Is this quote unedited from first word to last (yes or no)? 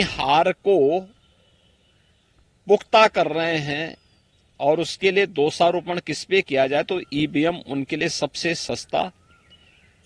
yes